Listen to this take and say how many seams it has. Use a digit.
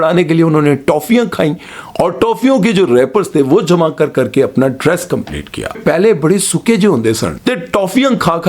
2